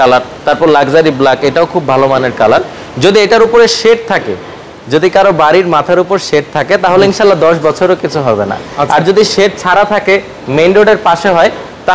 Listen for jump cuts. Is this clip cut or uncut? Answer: uncut